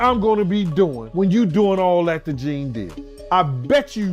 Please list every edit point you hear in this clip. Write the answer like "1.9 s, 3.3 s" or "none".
1.0 s, 3.3 s